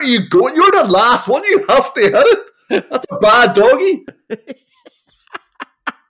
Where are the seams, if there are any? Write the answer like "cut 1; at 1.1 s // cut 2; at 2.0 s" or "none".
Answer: cut 1; at 4.2 s